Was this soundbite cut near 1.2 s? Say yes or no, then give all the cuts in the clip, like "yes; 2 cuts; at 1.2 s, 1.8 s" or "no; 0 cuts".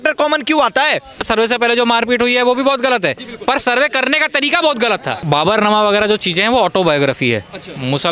yes; 2 cuts; at 1.2 s, 5.2 s